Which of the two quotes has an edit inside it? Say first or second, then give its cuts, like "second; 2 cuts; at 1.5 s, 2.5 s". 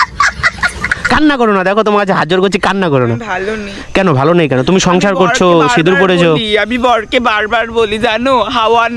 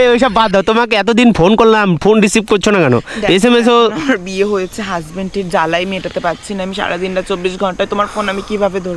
first; 1 cut; at 1.0 s